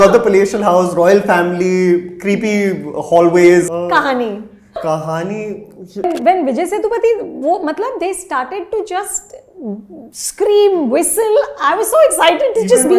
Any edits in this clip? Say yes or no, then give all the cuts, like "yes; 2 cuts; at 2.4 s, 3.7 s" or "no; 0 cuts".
yes; 3 cuts; at 3.7 s, 4.8 s, 6.0 s